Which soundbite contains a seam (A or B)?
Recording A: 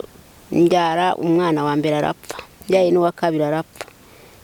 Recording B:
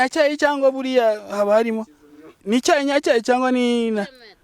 B